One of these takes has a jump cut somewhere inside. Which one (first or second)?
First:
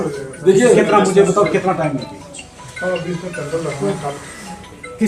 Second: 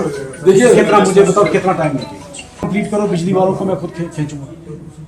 second